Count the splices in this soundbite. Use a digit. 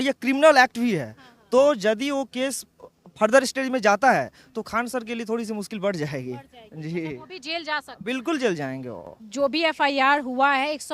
1